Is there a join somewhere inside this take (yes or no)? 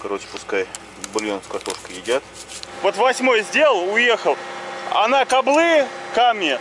yes